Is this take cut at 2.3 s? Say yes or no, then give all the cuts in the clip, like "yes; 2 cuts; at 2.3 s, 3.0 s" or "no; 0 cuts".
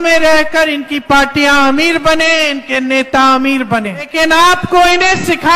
no; 1 cut; at 4.1 s